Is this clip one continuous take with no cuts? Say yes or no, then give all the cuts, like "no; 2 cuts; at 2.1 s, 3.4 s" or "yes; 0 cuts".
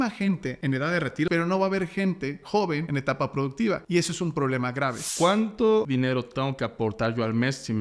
no; 5 cuts; at 1.0 s, 2.9 s, 3.8 s, 5.1 s, 5.9 s